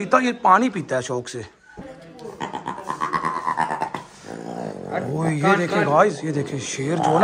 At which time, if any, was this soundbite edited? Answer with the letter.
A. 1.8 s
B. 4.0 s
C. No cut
A